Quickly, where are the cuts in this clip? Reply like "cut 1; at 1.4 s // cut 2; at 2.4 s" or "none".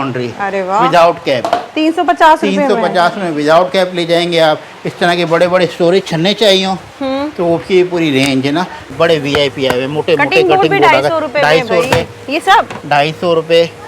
cut 1; at 8.9 s